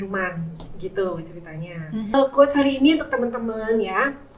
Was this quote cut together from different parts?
yes; 1 cut; at 2.1 s

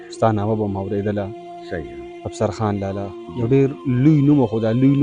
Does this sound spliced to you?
no; 0 cuts

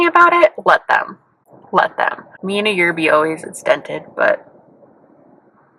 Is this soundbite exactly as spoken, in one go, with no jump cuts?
yes; 0 cuts

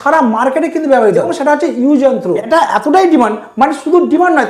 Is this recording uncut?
no; 2 cuts; at 1.3 s, 2.4 s

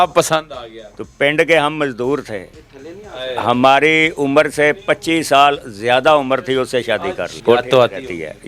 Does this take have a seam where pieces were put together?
yes; 1 cut; at 7.3 s

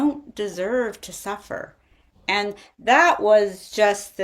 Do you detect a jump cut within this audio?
no; 0 cuts

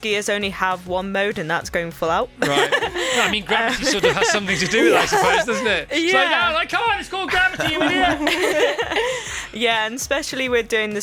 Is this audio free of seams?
yes; 0 cuts

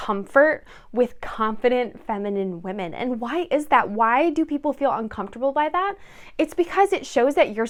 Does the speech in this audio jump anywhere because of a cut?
no; 0 cuts

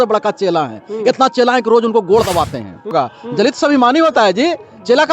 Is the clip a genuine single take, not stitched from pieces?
no; 1 cut; at 2.9 s

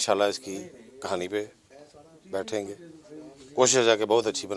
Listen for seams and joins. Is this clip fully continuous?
yes; 0 cuts

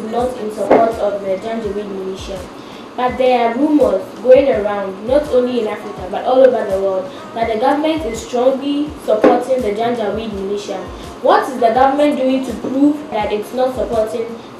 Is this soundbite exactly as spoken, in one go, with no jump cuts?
yes; 0 cuts

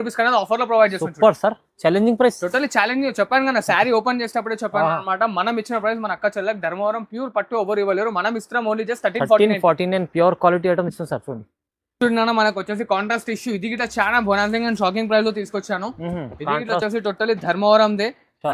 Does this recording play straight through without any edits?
yes; 0 cuts

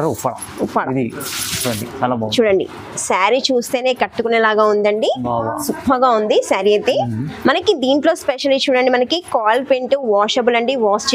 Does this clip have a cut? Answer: no; 0 cuts

